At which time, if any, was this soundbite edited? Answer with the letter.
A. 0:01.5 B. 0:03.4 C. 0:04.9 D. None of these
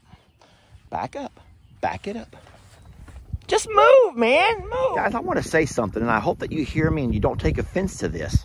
C